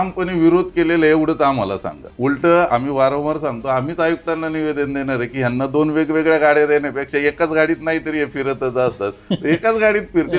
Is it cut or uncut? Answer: cut